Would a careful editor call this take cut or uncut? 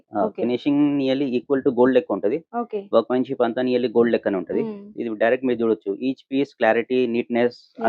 uncut